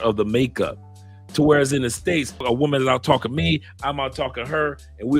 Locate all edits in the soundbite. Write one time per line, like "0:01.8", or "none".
0:02.4